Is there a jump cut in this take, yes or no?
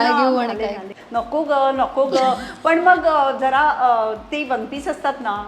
yes